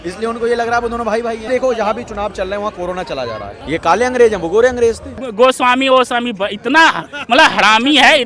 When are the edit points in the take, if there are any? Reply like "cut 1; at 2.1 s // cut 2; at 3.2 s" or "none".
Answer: cut 1; at 1.5 s // cut 2; at 3.6 s // cut 3; at 5.2 s

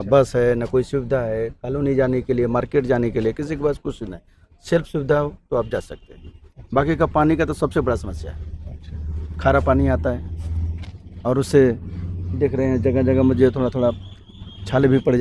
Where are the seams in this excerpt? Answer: none

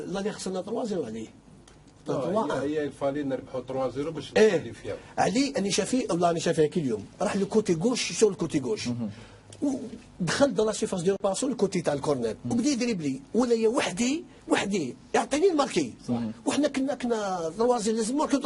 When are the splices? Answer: none

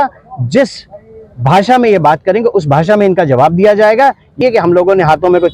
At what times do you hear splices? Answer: cut 1; at 4.3 s

